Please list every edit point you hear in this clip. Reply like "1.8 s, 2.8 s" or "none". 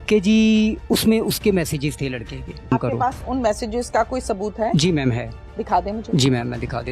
2.7 s